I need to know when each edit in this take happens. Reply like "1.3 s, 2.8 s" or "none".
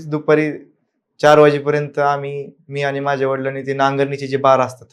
none